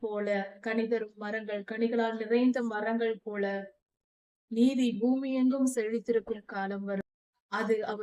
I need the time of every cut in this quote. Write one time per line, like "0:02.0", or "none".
0:07.0